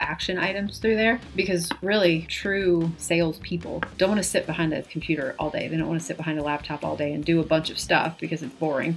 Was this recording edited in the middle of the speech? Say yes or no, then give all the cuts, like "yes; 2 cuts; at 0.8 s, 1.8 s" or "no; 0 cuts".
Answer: no; 0 cuts